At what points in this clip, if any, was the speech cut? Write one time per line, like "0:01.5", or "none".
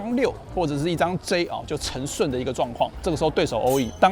0:03.0